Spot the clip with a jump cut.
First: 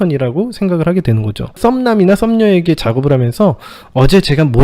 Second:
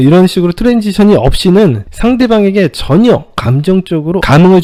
first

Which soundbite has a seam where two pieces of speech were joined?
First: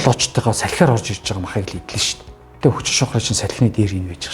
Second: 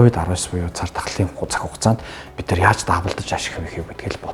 first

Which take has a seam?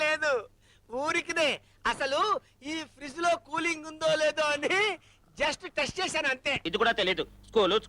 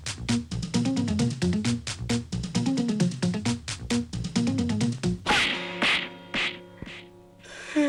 first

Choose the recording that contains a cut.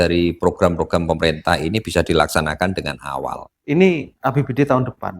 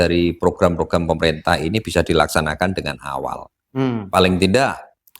first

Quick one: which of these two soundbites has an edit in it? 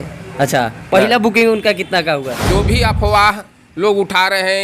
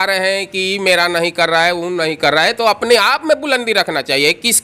first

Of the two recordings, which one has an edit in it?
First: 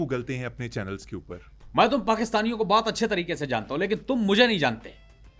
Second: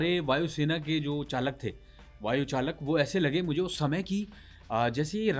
first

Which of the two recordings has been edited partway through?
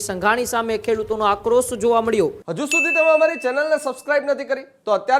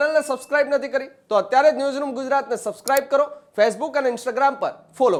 first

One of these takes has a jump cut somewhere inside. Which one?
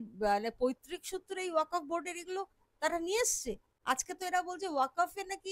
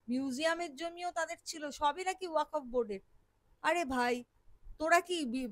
first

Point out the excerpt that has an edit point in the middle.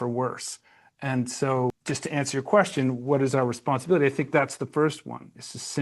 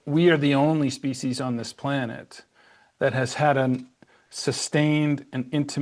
first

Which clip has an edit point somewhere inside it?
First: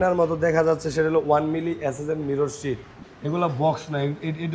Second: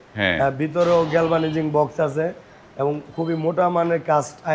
first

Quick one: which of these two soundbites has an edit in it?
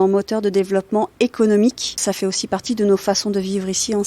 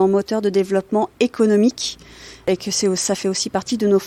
first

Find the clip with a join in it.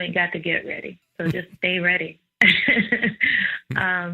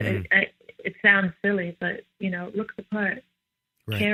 first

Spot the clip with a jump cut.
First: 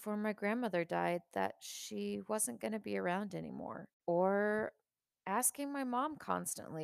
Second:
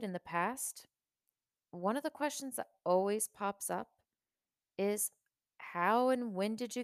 first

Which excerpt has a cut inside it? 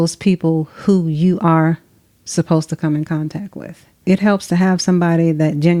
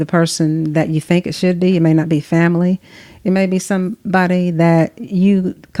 first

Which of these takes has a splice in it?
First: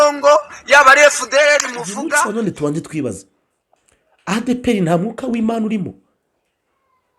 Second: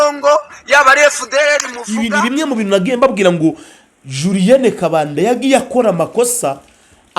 second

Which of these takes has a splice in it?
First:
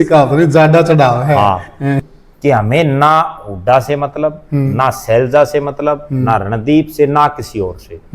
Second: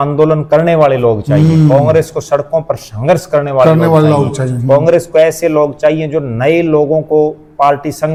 first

